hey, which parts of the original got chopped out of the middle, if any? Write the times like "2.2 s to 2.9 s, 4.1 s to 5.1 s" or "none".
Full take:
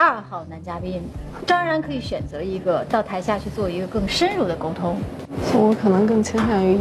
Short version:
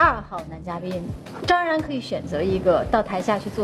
none